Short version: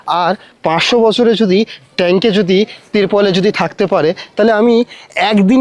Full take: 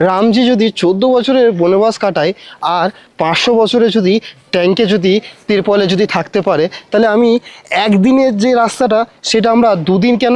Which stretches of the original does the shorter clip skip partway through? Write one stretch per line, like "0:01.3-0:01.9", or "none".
none

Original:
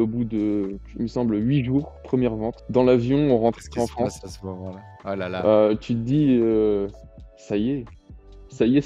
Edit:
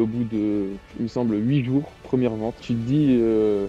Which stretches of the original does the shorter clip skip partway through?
0:02.6-0:05.8

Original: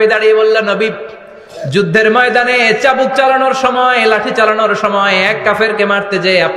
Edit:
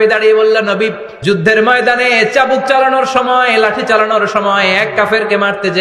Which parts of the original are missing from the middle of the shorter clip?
0:01.1-0:01.6

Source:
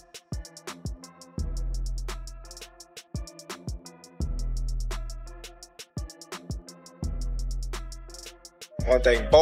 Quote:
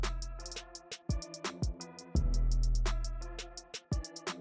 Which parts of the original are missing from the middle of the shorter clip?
none

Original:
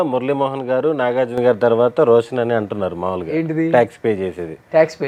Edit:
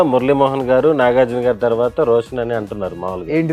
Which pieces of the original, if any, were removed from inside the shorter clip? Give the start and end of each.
none

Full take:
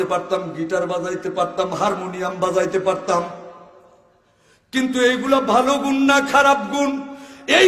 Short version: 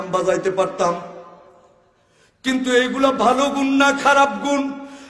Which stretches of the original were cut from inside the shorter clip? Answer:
none

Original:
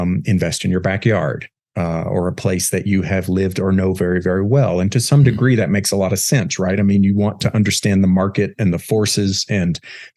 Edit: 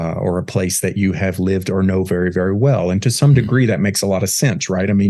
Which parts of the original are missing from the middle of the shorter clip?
none

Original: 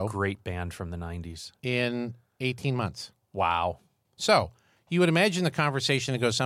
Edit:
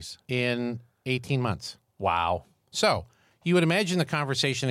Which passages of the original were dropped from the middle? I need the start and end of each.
0:03.9-0:04.0

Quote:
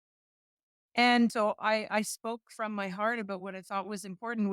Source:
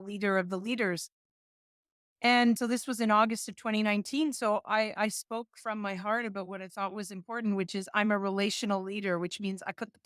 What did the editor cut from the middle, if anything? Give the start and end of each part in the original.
0:02.6-0:04.4

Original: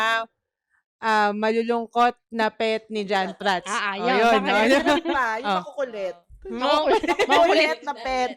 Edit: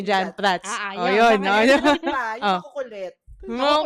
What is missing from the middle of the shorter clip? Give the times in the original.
none

